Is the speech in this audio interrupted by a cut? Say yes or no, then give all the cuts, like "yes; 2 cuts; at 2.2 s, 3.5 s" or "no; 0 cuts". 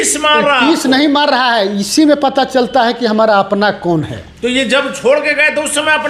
no; 0 cuts